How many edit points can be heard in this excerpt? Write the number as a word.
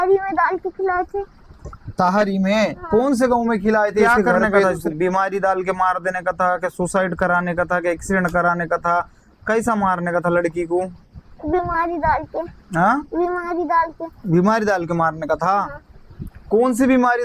one